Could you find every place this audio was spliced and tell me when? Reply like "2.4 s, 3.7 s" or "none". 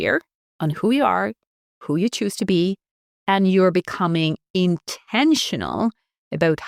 none